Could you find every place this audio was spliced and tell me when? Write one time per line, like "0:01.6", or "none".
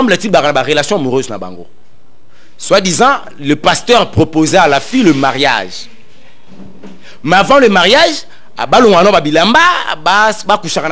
none